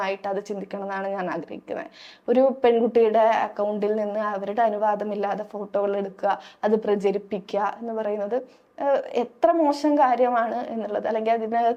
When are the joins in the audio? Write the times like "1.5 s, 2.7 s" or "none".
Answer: none